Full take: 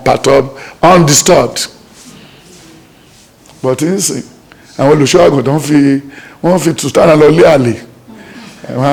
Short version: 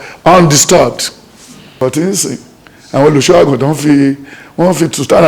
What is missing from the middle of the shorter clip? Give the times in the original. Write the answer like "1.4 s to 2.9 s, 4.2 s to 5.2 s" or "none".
2.4 s to 3.7 s

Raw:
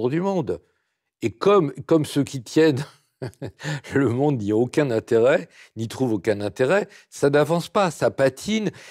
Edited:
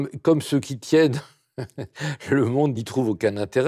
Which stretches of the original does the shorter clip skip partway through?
4.4 s to 5.8 s

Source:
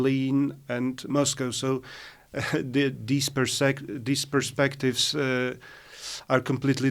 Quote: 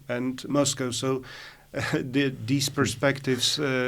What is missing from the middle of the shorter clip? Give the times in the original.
3.3 s to 4.2 s

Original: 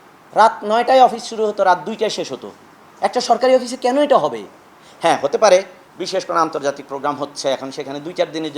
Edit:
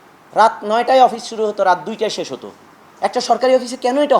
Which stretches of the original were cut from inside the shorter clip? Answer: none

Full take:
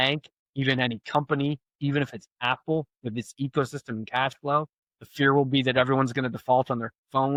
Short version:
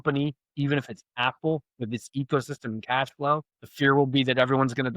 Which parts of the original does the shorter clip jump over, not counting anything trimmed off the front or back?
4.8 s to 5.0 s

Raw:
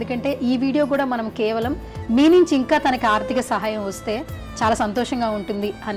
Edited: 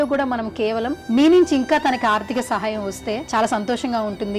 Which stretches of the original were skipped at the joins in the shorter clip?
1.8 s to 2.0 s, 4.2 s to 4.5 s

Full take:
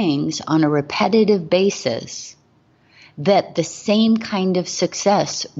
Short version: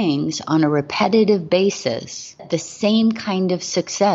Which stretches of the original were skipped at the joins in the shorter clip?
2.4 s to 3.5 s

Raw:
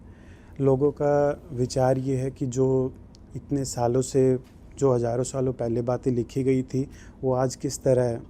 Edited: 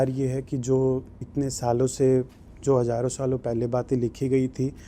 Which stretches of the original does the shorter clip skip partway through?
3.1 s to 3.3 s

